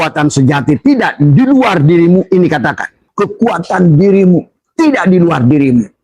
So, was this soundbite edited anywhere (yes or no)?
yes